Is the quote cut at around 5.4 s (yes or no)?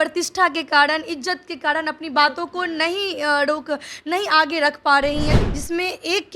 yes